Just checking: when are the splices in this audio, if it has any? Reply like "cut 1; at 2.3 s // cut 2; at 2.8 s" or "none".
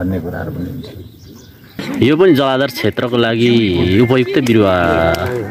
cut 1; at 1.8 s